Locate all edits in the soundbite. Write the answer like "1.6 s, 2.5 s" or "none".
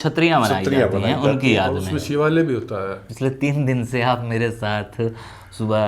3.0 s